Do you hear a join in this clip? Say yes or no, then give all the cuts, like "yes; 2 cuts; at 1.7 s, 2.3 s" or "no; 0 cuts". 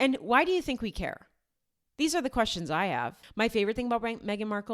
yes; 1 cut; at 3.2 s